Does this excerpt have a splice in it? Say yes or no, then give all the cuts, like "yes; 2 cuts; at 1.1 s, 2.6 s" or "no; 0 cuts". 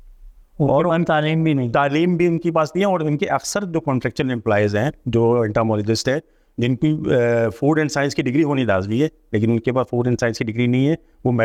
no; 0 cuts